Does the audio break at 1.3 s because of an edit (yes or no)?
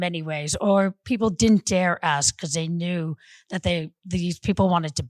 yes